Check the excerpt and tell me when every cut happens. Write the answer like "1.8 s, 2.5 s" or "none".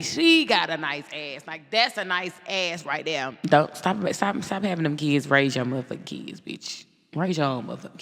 3.3 s